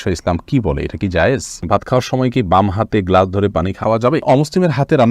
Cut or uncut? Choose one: cut